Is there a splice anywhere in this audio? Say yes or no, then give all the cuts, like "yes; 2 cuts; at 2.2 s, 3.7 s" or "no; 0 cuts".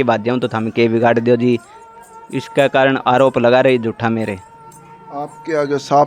no; 0 cuts